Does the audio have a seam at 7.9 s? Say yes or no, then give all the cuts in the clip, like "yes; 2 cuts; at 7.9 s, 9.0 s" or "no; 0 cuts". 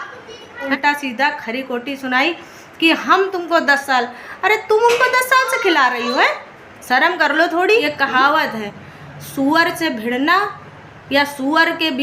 yes; 2 cuts; at 0.7 s, 7.9 s